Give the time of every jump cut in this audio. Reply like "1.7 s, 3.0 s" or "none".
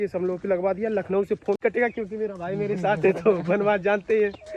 1.6 s